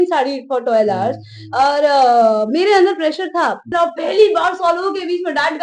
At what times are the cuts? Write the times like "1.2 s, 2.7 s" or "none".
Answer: 3.7 s